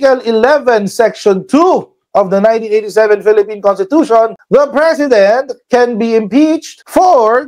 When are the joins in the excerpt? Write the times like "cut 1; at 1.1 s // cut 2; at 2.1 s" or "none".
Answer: none